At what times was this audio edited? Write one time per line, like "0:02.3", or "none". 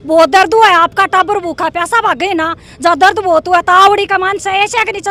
none